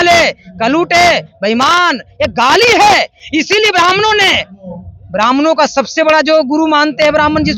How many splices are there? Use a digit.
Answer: 0